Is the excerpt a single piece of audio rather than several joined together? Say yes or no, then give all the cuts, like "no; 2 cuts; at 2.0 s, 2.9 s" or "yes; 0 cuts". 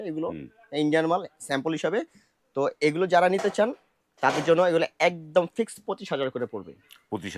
yes; 0 cuts